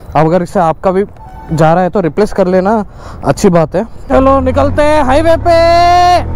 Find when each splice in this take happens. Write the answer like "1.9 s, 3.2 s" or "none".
4.0 s